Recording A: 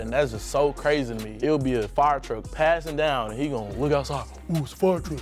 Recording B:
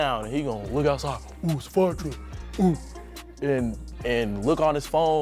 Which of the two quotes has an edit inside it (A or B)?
A